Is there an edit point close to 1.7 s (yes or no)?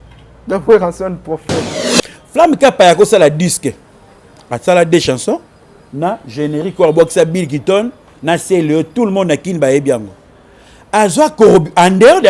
yes